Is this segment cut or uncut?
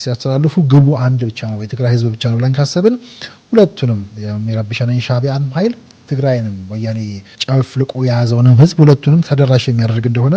cut